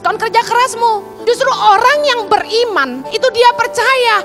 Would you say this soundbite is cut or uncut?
cut